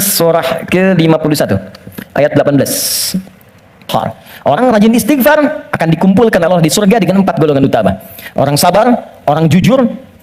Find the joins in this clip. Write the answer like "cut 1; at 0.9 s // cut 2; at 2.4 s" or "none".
cut 1; at 3.9 s